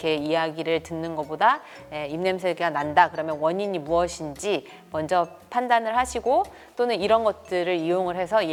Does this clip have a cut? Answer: no; 0 cuts

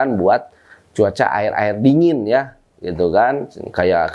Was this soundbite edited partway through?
no; 0 cuts

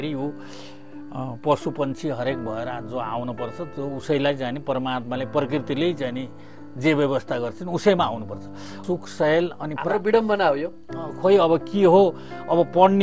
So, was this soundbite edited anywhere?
yes; 1 cut; at 8.7 s

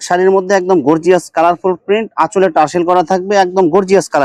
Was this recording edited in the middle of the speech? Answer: no; 0 cuts

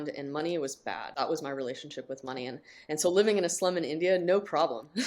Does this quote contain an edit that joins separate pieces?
yes; 1 cut; at 1.1 s

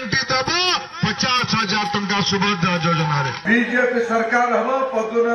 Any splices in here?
yes; 1 cut; at 3.4 s

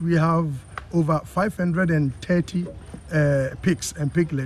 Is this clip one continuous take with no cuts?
yes; 0 cuts

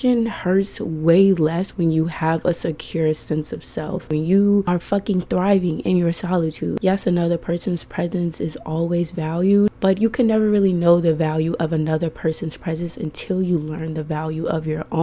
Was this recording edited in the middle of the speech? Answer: yes; 4 cuts; at 4.1 s, 4.7 s, 6.8 s, 9.7 s

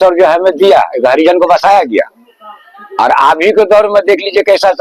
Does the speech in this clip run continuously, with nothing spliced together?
yes; 0 cuts

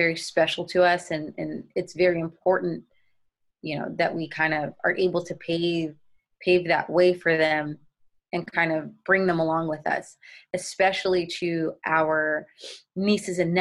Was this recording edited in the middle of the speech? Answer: no; 0 cuts

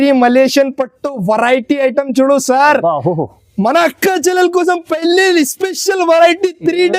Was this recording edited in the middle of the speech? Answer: no; 0 cuts

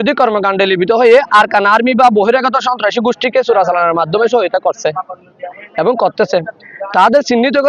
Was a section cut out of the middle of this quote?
no; 0 cuts

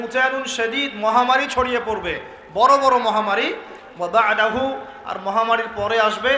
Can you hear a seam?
no; 0 cuts

